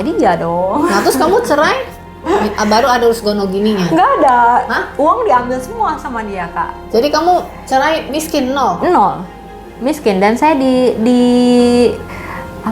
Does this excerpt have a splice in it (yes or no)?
no